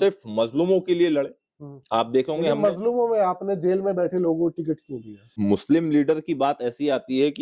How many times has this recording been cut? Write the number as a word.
one